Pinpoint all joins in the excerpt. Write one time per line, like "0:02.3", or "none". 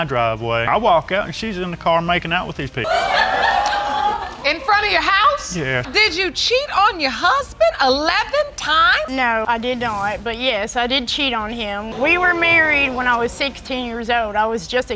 none